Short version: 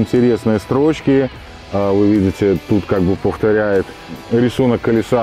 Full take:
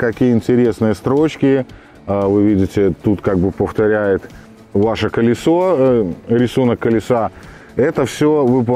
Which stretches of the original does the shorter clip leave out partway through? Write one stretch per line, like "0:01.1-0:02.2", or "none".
0:04.5-0:06.2